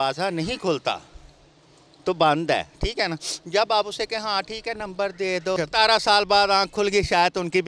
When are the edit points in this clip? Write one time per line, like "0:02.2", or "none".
0:05.6